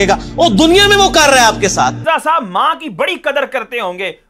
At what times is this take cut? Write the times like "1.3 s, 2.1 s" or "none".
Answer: 2.0 s